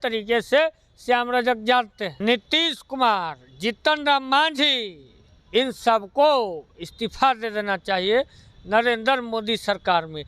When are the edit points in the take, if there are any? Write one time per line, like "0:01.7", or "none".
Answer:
0:02.0